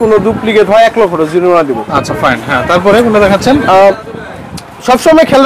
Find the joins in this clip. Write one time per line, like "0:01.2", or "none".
none